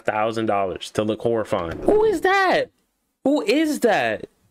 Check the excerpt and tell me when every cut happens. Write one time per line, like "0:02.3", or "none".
0:01.7